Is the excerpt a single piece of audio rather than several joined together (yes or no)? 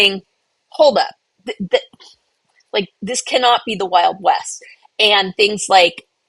yes